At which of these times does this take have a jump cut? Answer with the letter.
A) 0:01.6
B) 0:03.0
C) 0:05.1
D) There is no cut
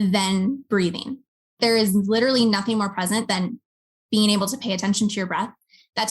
A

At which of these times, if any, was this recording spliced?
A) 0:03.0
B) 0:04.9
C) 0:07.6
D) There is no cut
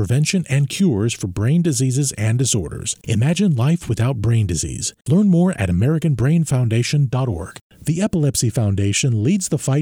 C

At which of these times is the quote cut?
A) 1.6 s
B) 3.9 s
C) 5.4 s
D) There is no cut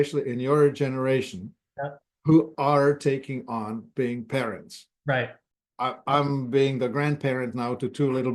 D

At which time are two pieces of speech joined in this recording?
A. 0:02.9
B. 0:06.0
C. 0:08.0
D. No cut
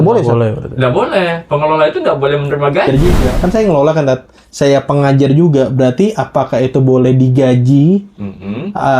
A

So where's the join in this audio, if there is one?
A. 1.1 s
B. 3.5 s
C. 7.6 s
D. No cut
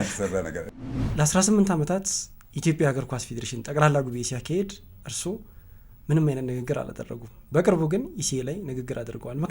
A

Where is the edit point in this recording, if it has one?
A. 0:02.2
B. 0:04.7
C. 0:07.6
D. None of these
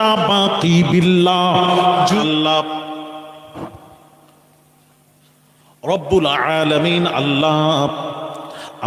A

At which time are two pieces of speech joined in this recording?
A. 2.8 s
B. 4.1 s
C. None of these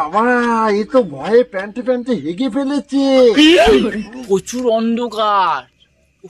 B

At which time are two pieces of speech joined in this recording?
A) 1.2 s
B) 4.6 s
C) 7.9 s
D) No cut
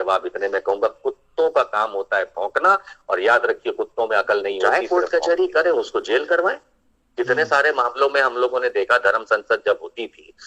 B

